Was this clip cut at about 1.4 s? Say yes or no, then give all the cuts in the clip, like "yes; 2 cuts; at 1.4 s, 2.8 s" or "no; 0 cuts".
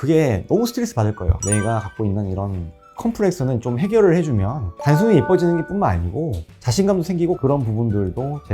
yes; 1 cut; at 1.4 s